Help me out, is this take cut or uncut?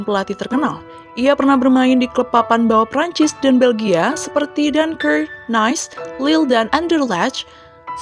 uncut